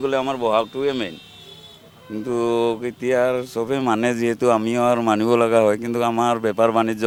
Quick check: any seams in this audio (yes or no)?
no